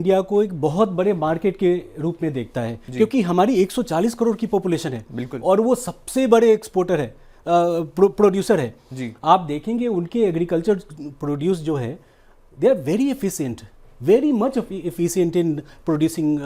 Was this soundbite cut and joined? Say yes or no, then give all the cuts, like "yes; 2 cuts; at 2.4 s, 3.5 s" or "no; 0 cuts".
no; 0 cuts